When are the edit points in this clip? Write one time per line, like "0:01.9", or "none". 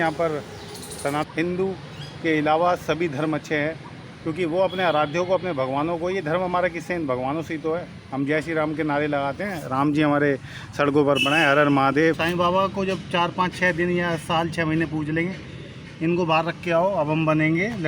0:01.3
0:12.2